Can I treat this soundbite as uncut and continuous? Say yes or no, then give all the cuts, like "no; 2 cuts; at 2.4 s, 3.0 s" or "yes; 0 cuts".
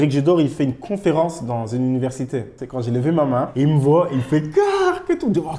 no; 1 cut; at 2.6 s